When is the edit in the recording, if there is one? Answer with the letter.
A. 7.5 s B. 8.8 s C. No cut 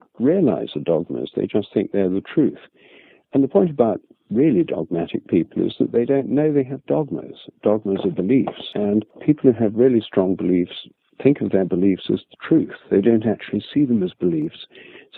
B